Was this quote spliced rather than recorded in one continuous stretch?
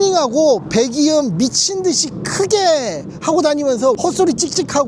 yes; 1 cut; at 4.0 s

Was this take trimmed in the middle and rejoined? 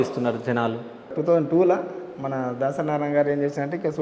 yes; 1 cut; at 1.1 s

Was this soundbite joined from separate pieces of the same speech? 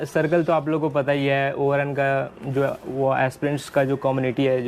no; 0 cuts

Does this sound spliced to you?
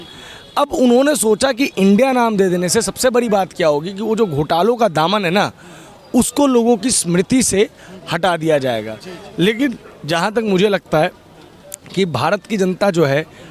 no; 0 cuts

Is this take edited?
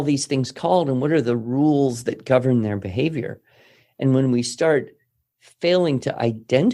no; 0 cuts

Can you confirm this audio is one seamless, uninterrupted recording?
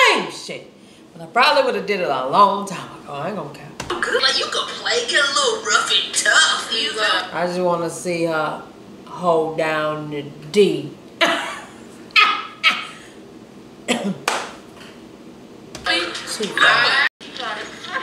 no; 2 cuts; at 4.2 s, 17.1 s

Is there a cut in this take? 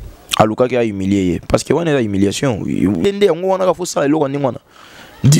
yes; 1 cut; at 3.0 s

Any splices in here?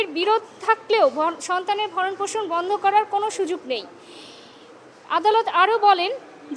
yes; 1 cut; at 4.4 s

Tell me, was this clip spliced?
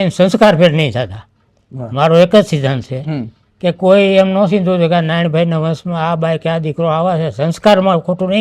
no; 0 cuts

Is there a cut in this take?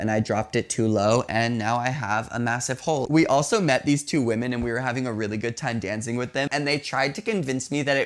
yes; 2 cuts; at 3.1 s, 6.5 s

